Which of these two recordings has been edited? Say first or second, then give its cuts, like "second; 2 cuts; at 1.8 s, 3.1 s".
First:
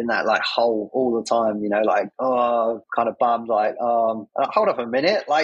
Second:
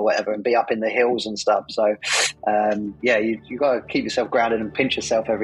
first; 3 cuts; at 2.1 s, 2.8 s, 4.5 s